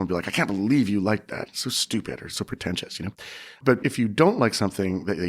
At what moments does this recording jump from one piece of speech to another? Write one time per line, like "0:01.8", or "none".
0:03.7

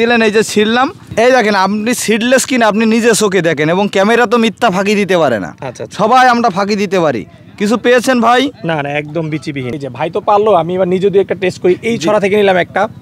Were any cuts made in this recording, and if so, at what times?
0:09.8

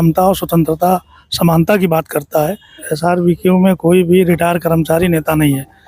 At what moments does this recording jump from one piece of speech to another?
0:02.9

